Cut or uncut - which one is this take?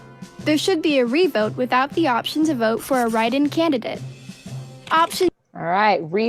uncut